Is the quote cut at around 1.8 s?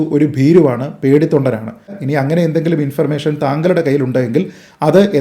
yes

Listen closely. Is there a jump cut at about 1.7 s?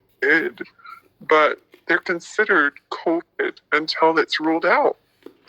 yes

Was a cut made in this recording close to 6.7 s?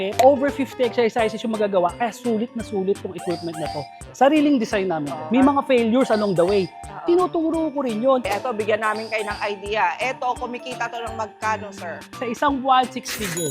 no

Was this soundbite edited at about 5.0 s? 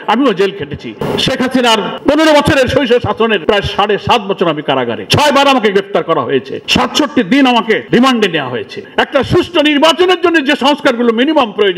yes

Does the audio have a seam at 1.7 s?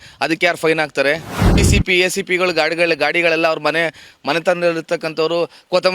yes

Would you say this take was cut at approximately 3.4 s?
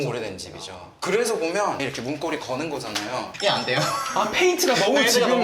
no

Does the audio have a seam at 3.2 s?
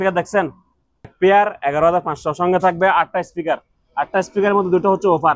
no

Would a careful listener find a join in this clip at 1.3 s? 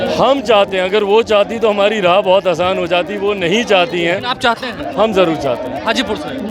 no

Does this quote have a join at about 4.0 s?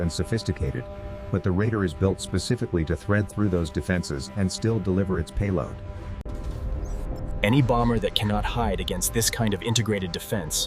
no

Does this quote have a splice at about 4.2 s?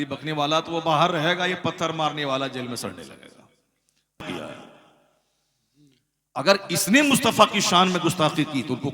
yes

